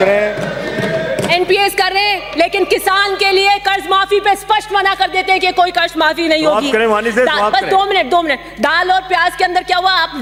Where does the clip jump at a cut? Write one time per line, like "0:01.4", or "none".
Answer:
none

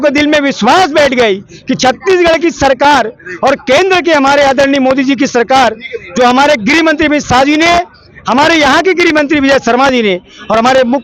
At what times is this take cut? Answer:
none

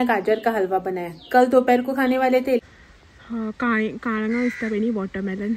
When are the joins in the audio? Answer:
0:02.6

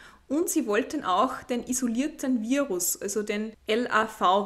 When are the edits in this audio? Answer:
0:03.6

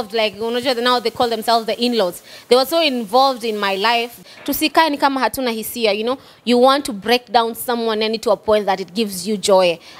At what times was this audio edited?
0:04.1

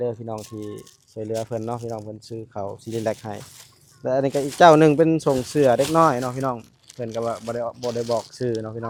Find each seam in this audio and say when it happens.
none

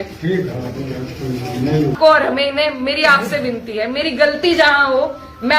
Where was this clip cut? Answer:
0:02.0

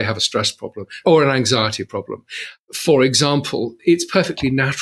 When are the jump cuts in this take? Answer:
0:01.0
0:03.7

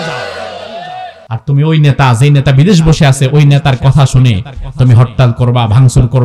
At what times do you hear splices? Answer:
0:01.2

